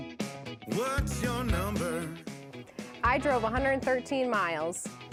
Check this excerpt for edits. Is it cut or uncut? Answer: uncut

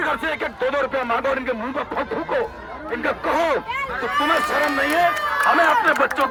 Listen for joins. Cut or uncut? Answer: uncut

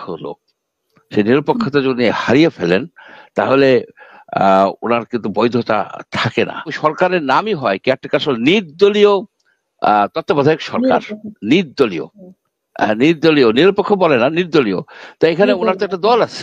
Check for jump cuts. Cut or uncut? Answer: cut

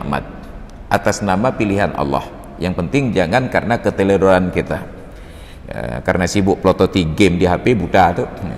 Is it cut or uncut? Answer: uncut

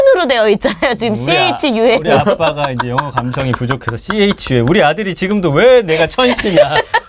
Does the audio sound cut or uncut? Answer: uncut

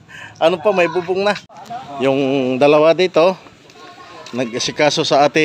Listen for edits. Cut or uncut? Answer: cut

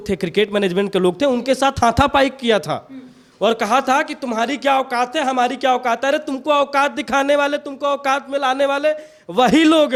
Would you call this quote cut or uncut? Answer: uncut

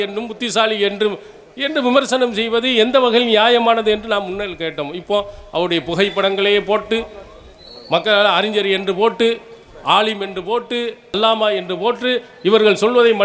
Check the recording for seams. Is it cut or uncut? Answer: uncut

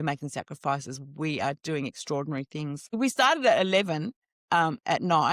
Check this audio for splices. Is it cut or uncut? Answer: cut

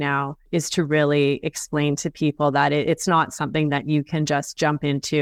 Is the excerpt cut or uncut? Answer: uncut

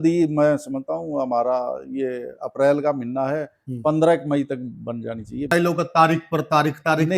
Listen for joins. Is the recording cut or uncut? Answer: cut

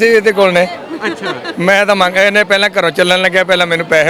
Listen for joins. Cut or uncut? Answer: uncut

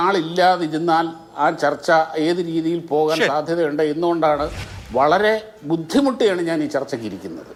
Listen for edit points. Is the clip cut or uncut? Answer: uncut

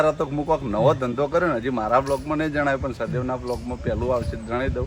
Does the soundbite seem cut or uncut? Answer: uncut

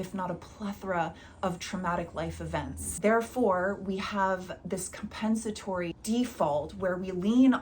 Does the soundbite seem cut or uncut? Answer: cut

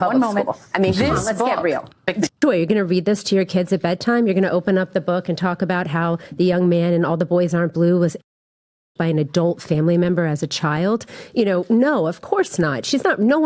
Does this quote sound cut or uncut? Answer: cut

